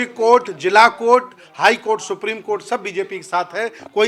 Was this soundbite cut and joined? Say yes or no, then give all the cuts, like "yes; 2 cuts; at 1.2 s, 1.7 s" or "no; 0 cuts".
no; 0 cuts